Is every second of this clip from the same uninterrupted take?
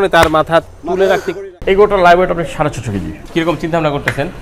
no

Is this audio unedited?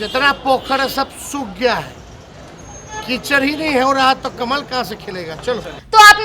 yes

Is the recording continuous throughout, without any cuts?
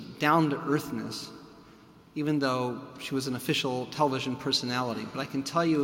no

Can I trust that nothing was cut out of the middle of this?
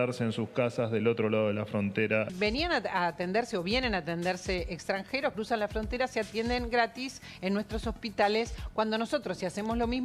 no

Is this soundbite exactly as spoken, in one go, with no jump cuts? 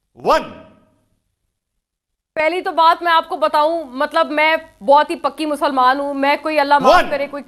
yes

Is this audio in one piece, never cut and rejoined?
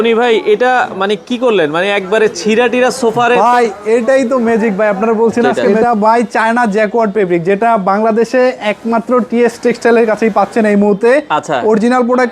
no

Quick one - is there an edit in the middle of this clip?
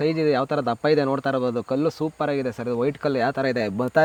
no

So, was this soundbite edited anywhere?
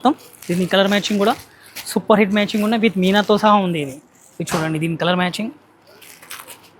no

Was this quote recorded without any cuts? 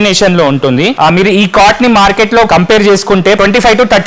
no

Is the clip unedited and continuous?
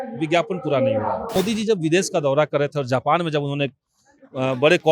no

